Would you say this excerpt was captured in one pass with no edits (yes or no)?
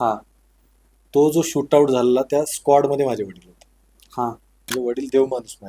no